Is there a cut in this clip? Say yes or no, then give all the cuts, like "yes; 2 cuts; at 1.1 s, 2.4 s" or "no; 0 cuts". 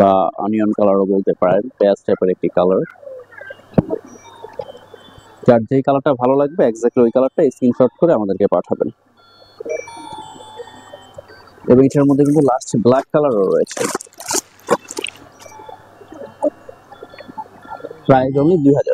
no; 0 cuts